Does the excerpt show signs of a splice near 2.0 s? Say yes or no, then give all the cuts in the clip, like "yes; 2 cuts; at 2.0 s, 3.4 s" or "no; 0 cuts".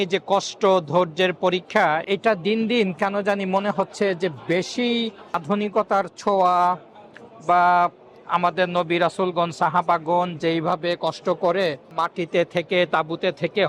yes; 3 cuts; at 2.0 s, 5.4 s, 11.8 s